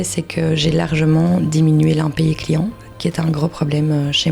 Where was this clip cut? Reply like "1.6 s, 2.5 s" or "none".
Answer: none